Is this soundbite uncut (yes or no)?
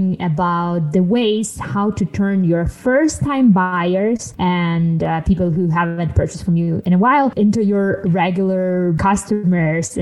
no